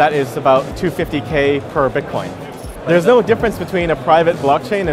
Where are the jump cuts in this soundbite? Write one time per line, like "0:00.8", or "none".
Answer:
0:02.9